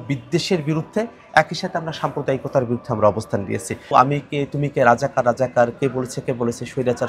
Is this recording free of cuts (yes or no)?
no